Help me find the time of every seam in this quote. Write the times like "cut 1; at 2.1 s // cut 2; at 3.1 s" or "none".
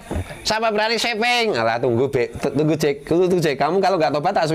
none